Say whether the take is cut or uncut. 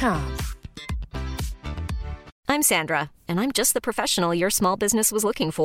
cut